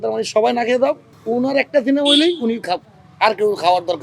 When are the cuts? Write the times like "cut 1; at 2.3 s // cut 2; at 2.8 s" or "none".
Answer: cut 1; at 1.1 s